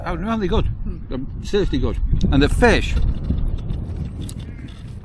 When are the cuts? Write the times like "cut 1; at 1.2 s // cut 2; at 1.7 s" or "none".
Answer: none